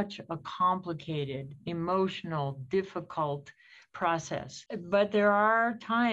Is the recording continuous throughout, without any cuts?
no; 1 cut; at 4.6 s

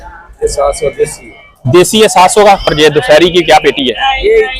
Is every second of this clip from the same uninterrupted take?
no; 1 cut; at 2.7 s

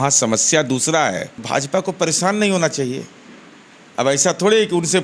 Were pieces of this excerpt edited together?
yes; 1 cut; at 1.4 s

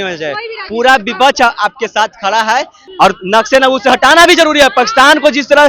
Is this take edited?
yes; 1 cut; at 2.8 s

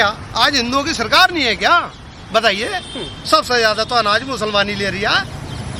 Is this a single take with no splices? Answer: yes; 0 cuts

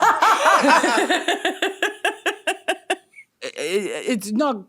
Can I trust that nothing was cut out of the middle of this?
no; 1 cut; at 3.4 s

